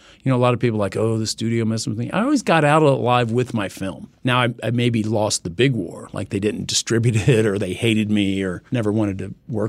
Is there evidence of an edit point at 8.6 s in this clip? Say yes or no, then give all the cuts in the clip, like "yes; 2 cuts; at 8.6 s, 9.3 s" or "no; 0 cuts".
yes; 2 cuts; at 4.0 s, 8.6 s